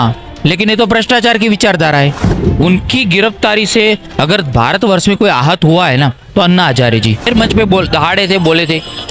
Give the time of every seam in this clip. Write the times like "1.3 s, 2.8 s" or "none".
7.2 s